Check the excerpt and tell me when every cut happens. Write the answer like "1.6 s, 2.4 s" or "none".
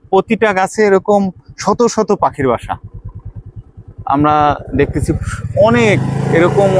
none